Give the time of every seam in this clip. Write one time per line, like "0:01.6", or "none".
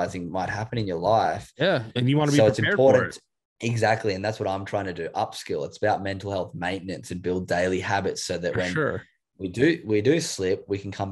none